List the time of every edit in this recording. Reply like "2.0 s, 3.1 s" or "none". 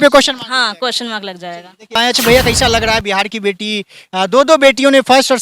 2.0 s